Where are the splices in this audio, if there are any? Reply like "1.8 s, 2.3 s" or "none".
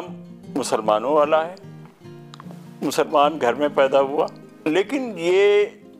4.5 s